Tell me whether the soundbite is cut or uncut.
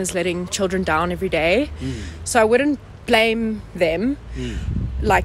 uncut